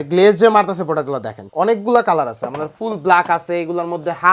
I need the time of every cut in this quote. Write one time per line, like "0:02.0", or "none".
0:01.4